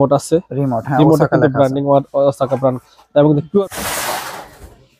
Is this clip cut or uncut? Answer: cut